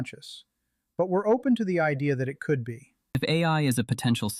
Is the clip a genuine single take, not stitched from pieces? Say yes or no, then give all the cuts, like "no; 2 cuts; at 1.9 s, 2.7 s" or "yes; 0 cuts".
no; 1 cut; at 3.2 s